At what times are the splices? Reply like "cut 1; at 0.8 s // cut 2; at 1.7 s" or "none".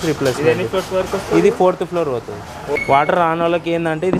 cut 1; at 2.7 s